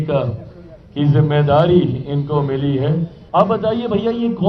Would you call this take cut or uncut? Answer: cut